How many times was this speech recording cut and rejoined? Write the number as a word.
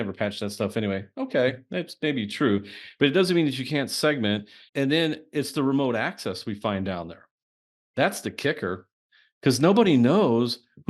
one